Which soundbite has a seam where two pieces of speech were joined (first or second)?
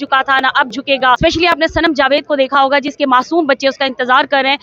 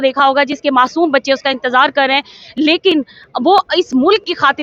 first